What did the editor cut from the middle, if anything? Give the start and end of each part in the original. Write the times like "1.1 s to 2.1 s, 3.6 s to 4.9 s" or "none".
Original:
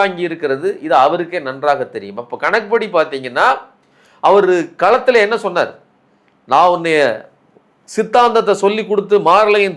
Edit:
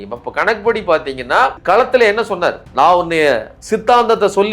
3.6 s to 4.7 s, 5.8 s to 6.4 s, 7.3 s to 7.8 s